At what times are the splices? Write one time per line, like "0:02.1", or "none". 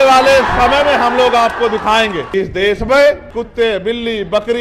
0:02.2
0:03.4